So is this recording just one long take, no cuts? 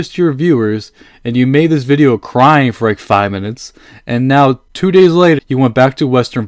no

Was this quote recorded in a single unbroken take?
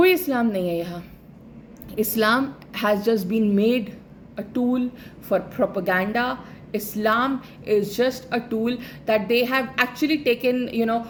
yes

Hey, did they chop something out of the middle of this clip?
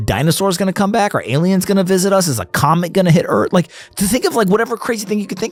no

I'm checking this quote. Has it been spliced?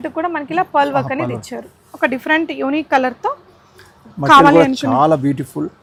no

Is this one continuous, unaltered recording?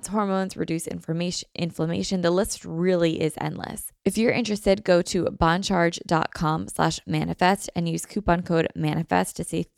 no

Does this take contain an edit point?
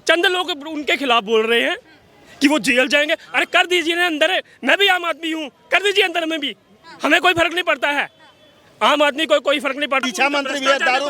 yes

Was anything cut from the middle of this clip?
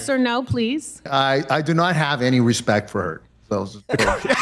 yes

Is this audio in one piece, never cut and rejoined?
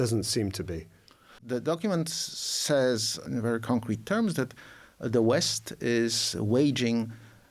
no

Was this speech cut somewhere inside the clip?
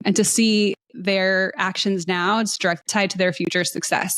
yes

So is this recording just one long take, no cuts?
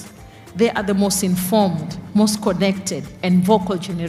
yes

